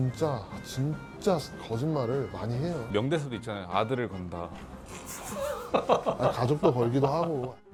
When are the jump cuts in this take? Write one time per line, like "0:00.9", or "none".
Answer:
none